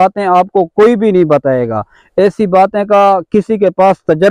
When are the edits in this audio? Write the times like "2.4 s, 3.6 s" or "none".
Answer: none

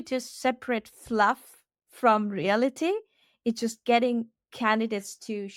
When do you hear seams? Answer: none

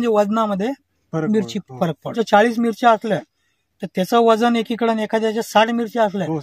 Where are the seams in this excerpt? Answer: 2.1 s

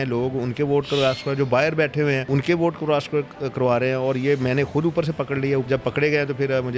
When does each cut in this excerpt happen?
2.2 s, 5.6 s

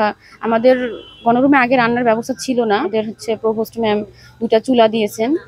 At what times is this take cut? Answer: 2.9 s

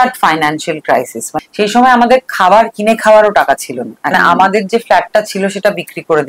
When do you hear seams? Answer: 1.3 s, 4.1 s

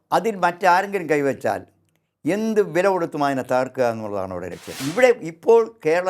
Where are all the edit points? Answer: 4.7 s

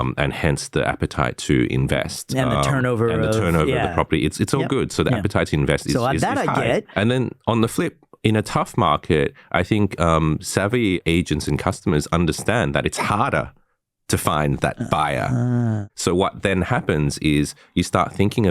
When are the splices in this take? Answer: 6.9 s, 15.8 s

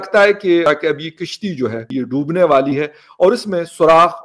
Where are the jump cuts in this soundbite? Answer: 0.7 s, 1.8 s

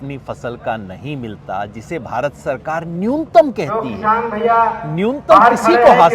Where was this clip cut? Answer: none

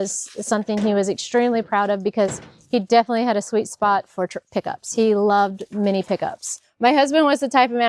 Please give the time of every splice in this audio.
6.6 s

